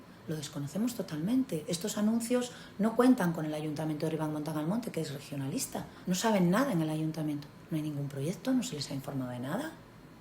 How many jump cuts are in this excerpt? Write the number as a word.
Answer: one